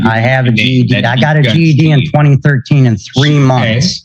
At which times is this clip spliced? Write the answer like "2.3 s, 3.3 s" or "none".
none

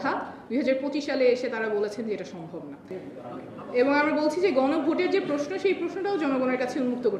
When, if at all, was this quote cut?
2.8 s

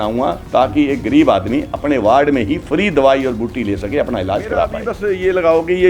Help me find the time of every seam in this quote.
4.9 s

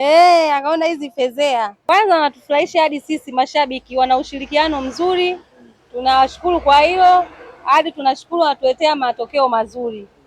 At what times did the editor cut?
1.8 s

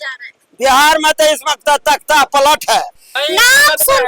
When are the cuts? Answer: 3.1 s

